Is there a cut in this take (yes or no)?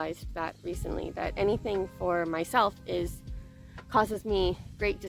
no